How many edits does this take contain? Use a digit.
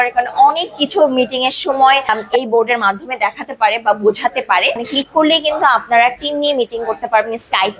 2